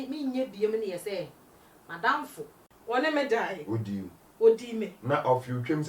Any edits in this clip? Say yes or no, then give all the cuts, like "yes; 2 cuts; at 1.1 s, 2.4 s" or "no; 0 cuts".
yes; 1 cut; at 2.7 s